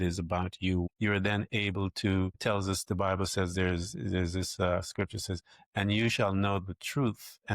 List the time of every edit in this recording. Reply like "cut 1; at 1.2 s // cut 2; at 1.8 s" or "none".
cut 1; at 0.9 s